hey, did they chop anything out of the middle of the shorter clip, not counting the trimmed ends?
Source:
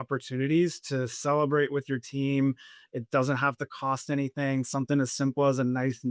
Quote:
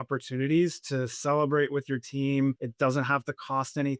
yes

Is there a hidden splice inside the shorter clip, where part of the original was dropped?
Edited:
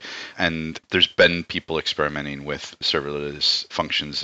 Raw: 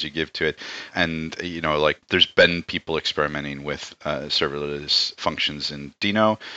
yes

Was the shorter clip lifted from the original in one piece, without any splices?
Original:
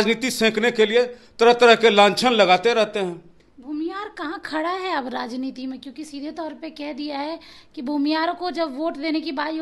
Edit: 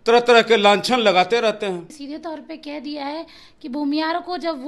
no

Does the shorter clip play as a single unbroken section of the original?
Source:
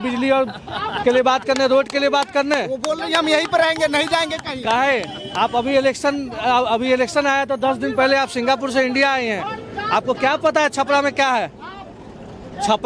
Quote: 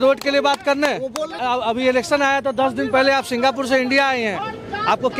no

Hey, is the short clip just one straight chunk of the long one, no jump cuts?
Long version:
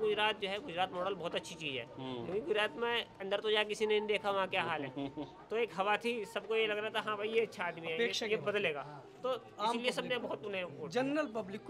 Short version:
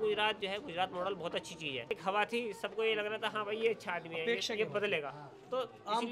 no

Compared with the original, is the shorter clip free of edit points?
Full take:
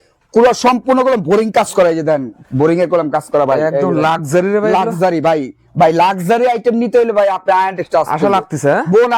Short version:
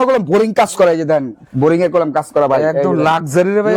yes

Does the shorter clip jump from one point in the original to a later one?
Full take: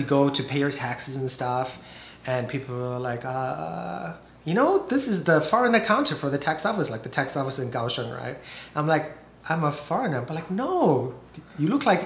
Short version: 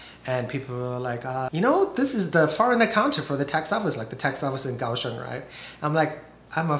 yes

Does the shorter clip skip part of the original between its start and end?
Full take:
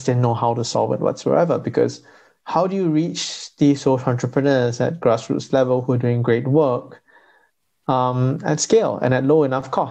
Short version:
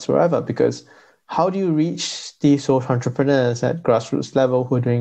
no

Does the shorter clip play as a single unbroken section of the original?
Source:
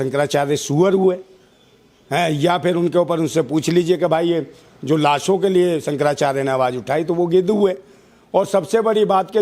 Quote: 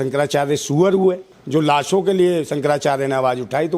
no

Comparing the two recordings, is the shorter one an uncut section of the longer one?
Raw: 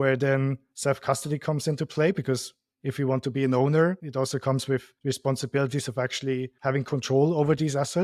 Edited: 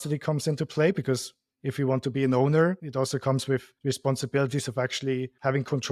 yes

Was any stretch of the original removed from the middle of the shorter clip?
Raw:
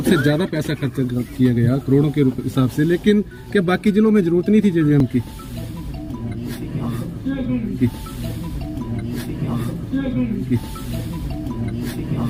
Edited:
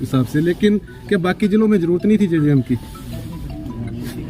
yes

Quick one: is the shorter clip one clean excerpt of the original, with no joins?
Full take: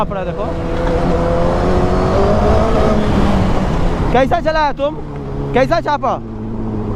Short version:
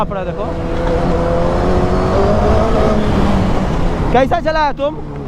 yes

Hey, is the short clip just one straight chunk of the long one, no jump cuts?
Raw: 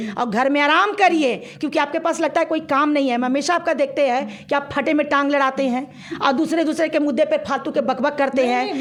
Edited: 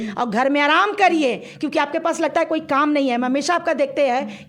yes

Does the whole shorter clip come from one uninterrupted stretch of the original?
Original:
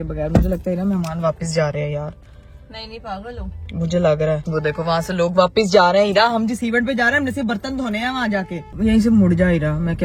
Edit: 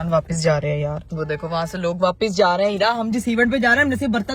no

